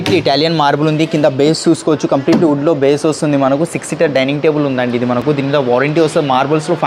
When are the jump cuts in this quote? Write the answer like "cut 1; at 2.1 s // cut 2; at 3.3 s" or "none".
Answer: none